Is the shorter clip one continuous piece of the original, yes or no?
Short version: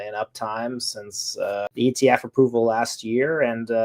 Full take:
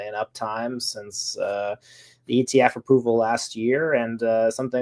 no